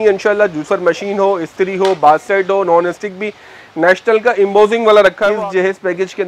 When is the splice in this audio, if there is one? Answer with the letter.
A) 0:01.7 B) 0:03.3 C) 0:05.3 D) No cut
C